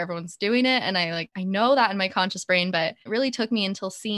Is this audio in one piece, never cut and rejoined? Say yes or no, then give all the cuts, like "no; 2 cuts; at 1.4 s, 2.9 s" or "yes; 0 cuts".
no; 2 cuts; at 1.3 s, 3.0 s